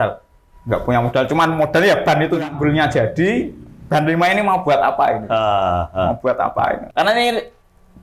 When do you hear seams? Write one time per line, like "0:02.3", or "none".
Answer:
0:02.4
0:06.8